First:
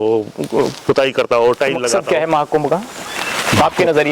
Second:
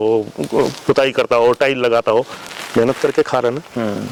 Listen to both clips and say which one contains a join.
first; 1 cut; at 2.0 s

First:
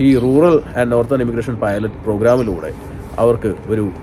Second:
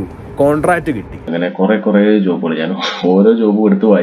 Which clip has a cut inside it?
second; 1 cut; at 1.3 s

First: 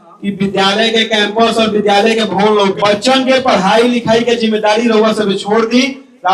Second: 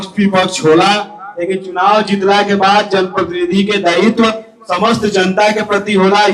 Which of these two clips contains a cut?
first; 1 cut; at 2.8 s

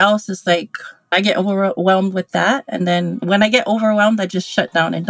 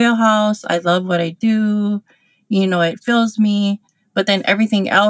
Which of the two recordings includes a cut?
first; 2 cuts; at 1.1 s, 3.2 s

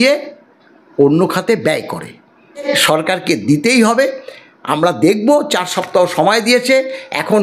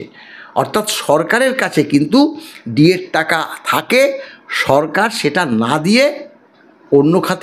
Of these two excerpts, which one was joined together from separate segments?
first; 1 cut; at 2.7 s

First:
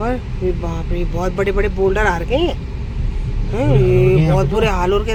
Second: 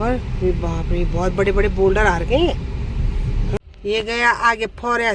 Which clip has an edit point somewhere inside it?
second; 1 cut; at 3.6 s

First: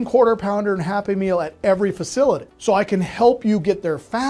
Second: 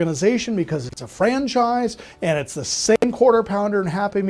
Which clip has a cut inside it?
first; 1 cut; at 2.5 s

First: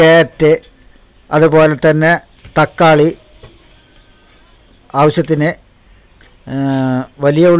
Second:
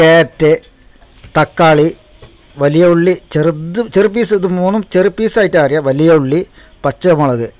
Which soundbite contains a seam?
second; 2 cuts; at 1.1 s, 2.5 s

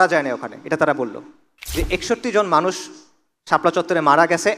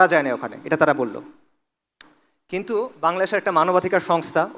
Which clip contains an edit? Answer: first; 1 cut; at 1.6 s

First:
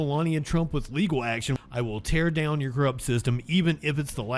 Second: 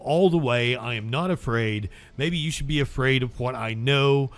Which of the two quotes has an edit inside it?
first; 1 cut; at 1.5 s

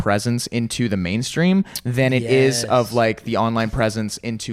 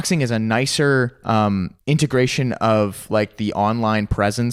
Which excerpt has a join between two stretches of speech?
second; 1 cut; at 1.7 s

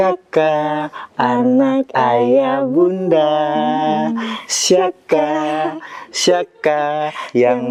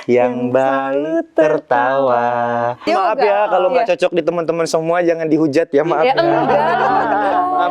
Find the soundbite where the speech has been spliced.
second; 1 cut; at 2.9 s

